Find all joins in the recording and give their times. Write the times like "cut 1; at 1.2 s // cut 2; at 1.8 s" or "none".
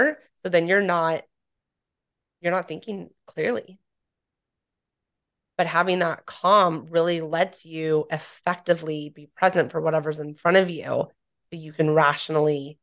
none